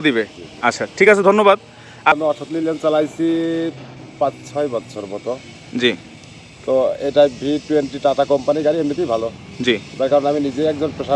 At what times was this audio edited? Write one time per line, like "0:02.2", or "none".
0:02.2